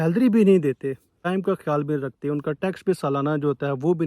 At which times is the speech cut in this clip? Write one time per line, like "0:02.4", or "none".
0:01.2